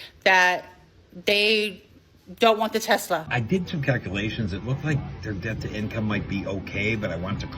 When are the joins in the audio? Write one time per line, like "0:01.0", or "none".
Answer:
0:03.3